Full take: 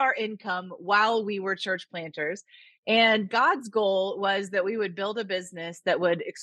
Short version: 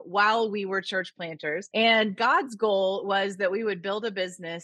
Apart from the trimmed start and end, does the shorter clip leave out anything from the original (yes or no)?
yes